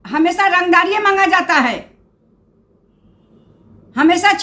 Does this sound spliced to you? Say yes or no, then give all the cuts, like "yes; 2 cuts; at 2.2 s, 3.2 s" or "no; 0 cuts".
no; 0 cuts